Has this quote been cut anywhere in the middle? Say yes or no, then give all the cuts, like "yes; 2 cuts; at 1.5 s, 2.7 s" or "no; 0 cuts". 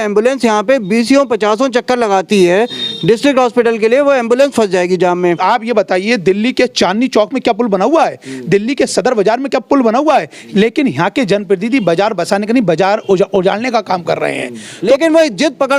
yes; 3 cuts; at 5.4 s, 10.4 s, 14.7 s